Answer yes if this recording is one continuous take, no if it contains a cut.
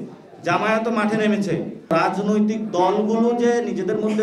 no